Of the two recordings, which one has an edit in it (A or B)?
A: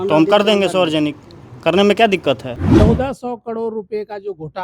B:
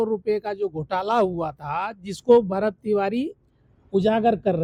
A